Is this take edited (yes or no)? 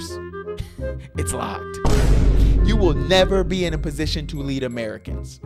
no